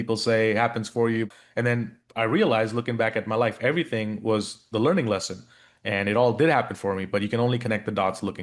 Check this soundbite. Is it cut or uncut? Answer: cut